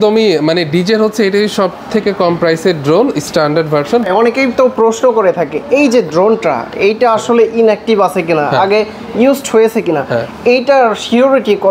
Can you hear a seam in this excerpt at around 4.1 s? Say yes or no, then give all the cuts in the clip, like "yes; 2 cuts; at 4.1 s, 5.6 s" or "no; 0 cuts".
yes; 1 cut; at 4.1 s